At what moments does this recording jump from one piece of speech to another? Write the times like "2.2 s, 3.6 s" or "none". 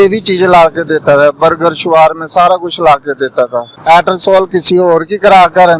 3.7 s